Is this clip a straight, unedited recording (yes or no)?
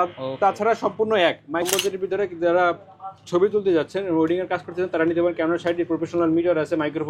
no